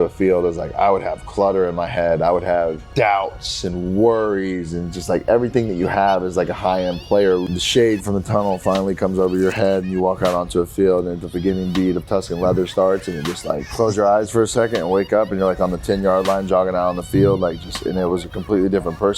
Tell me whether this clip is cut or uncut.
cut